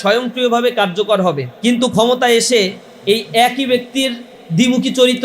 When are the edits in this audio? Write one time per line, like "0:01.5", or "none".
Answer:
0:01.5